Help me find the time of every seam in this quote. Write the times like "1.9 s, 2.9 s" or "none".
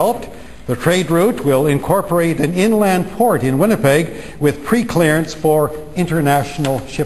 none